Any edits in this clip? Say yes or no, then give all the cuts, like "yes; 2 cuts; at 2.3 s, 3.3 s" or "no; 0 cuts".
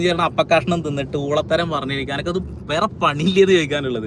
no; 0 cuts